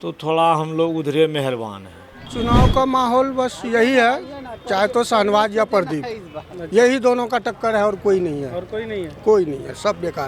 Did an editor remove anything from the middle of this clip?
yes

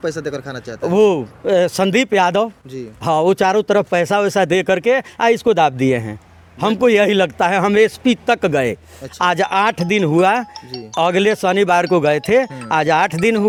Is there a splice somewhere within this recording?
no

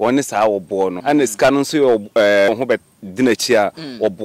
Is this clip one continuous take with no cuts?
no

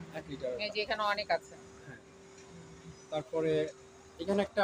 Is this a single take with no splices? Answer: yes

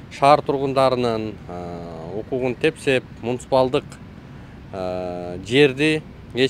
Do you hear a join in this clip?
no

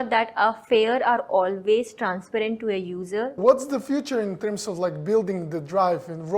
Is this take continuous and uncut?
no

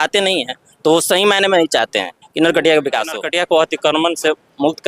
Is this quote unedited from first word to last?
no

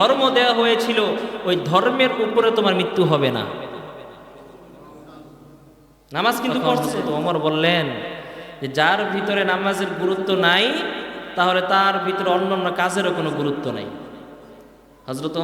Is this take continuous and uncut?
no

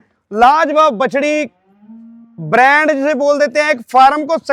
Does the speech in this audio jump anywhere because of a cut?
no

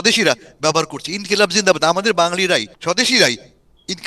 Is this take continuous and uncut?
no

